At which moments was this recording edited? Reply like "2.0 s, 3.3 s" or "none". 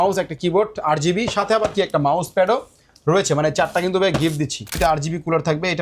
4.7 s